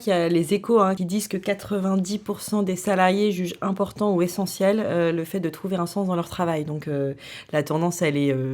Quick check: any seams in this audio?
yes; 1 cut; at 1.0 s

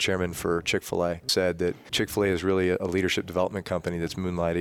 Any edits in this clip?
yes; 2 cuts; at 1.3 s, 2.8 s

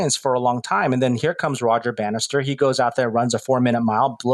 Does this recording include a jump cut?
no; 0 cuts

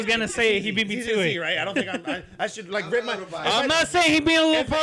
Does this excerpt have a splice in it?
no; 0 cuts

